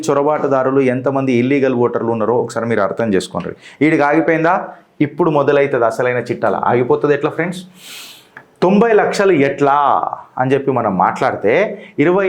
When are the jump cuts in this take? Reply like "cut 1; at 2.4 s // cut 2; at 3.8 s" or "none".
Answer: none